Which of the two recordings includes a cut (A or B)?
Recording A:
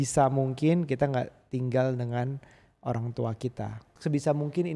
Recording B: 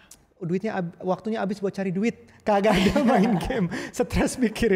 A